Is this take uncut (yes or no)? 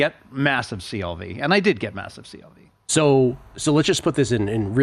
yes